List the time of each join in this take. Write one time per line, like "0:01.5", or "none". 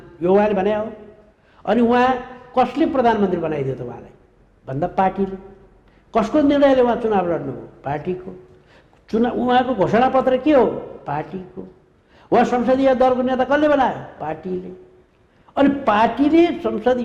none